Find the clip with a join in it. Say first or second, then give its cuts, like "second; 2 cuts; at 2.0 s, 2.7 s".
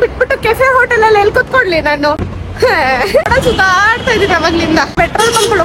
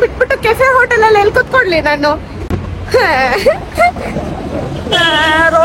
first; 3 cuts; at 2.4 s, 3.3 s, 5.0 s